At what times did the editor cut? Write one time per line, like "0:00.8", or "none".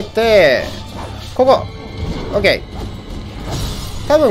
none